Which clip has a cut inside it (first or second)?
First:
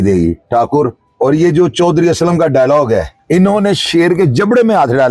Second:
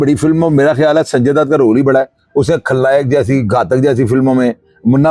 first